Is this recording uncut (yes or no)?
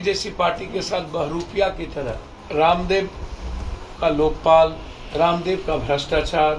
no